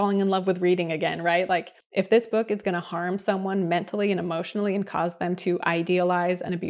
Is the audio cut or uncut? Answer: cut